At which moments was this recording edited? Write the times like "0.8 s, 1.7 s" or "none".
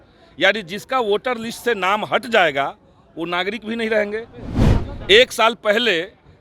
4.5 s